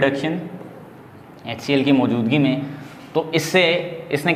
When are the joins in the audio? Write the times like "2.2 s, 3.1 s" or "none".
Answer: none